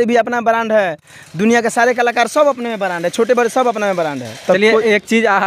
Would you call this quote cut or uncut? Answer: uncut